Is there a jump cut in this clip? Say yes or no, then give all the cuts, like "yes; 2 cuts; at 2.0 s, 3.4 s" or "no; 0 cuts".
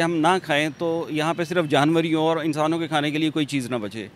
no; 0 cuts